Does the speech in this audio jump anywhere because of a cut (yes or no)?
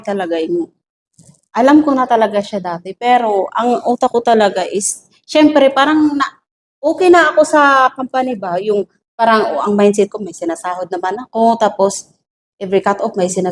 no